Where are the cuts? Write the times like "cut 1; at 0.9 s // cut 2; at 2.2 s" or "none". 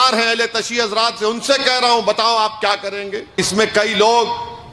cut 1; at 3.4 s